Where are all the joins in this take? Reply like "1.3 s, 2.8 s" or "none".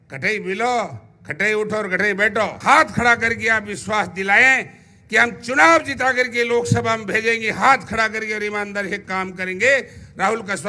2.6 s